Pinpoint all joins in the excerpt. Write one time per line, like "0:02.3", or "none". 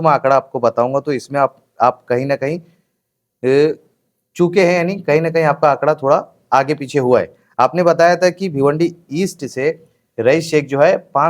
none